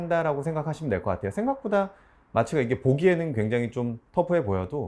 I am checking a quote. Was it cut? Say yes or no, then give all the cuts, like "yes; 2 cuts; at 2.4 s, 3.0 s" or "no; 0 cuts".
no; 0 cuts